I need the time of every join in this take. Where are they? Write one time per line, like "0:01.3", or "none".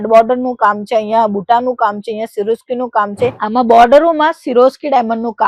0:03.4